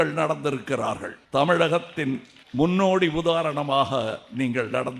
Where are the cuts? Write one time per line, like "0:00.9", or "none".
0:01.1
0:02.3

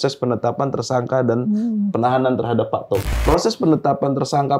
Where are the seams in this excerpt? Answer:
0:03.0

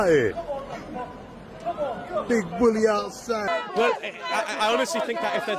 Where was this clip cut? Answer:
0:03.5

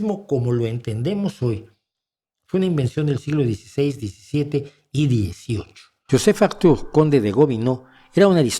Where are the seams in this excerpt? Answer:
0:06.1

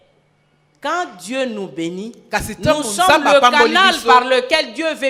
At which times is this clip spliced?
none

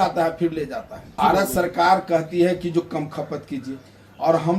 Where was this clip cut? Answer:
0:01.2

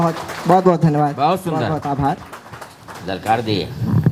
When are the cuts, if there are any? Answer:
none

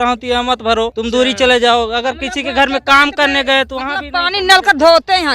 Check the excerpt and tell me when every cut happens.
0:01.0

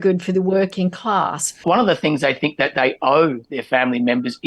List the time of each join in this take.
0:01.6

